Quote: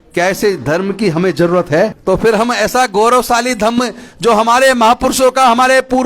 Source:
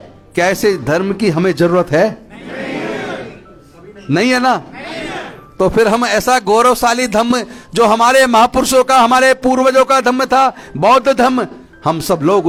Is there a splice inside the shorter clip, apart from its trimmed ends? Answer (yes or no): yes